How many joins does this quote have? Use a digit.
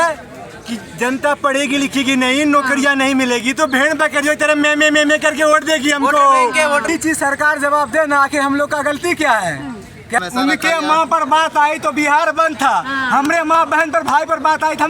2